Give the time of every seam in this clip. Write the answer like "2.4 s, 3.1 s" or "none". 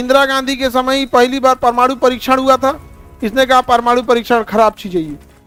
none